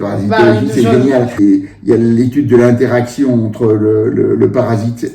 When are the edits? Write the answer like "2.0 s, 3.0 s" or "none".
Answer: 1.3 s